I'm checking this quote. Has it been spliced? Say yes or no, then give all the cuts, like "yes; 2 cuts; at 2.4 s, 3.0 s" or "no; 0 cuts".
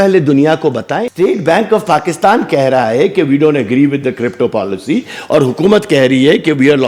yes; 1 cut; at 1.0 s